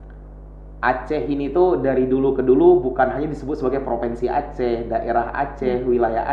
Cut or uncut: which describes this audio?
uncut